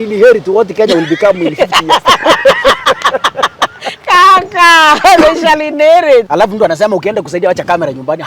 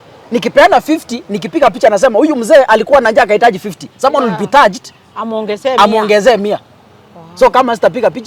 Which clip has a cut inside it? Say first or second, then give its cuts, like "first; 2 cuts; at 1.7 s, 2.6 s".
first; 1 cut; at 6.3 s